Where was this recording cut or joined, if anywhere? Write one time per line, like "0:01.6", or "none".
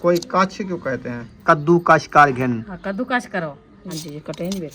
0:01.4
0:03.8